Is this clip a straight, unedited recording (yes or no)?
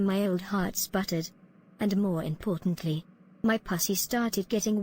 yes